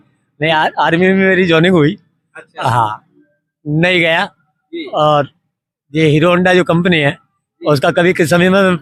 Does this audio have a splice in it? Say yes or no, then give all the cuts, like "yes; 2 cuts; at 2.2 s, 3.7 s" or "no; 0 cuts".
no; 0 cuts